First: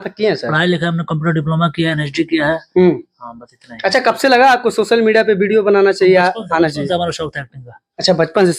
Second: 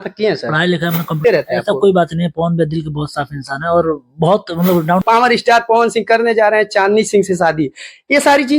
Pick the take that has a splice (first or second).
second